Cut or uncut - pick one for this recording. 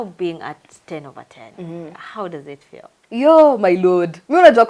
uncut